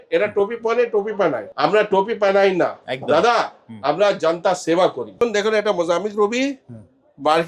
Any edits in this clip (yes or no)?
yes